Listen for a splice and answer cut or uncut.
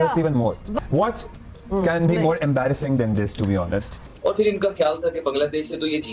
uncut